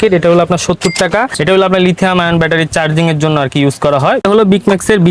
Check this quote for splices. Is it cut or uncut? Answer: cut